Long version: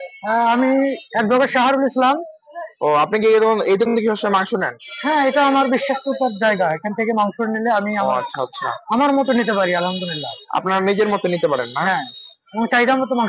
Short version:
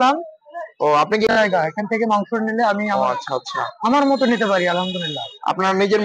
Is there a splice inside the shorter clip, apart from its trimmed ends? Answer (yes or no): yes